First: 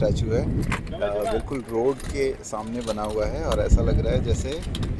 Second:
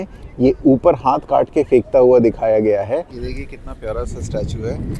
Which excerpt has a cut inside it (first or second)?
second